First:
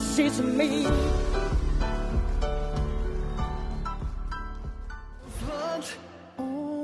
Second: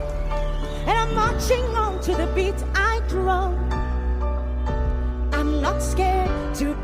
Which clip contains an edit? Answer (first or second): first